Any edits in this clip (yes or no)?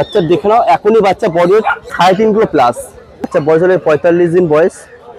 yes